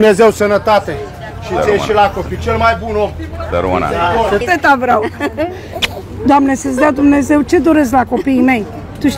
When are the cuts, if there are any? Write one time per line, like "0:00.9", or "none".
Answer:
0:04.4